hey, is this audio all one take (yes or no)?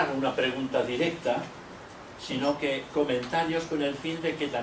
no